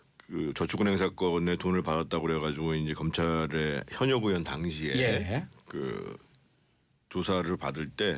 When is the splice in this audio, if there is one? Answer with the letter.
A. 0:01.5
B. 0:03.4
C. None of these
A